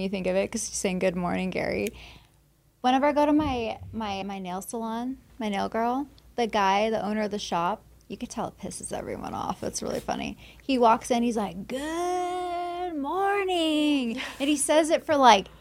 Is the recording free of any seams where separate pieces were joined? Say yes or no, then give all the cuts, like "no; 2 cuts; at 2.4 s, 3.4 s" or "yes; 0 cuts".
no; 1 cut; at 4.2 s